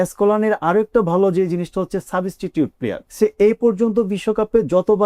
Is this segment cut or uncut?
cut